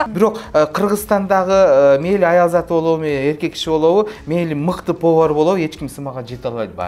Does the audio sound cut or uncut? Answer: uncut